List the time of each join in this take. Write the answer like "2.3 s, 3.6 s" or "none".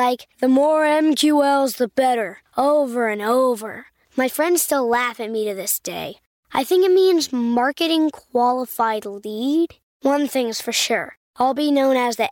none